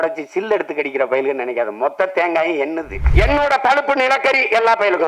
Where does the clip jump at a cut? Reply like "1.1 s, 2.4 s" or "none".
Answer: 2.9 s